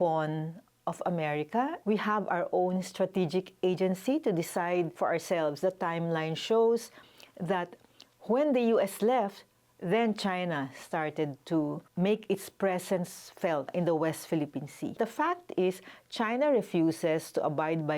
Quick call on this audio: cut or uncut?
cut